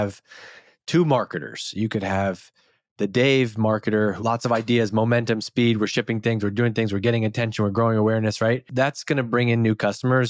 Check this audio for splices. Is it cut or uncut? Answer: cut